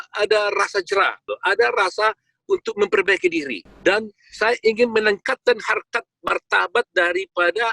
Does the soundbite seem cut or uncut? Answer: cut